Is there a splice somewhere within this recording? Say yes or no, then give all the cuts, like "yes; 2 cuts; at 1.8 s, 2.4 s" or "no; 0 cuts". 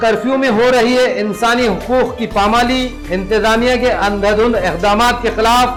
no; 0 cuts